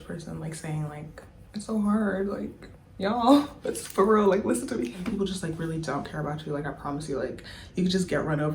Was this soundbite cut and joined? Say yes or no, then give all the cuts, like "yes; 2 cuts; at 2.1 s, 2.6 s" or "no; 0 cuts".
yes; 1 cut; at 5.1 s